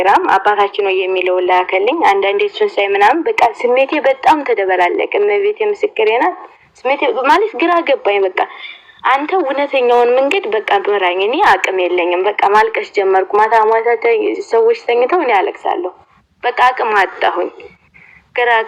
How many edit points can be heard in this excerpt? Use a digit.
0